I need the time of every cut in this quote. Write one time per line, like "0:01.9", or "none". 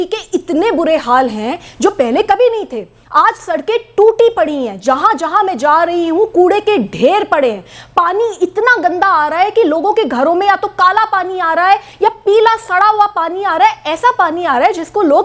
none